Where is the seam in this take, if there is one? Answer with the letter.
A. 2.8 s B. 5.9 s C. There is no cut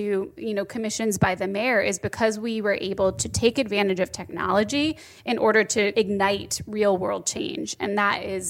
B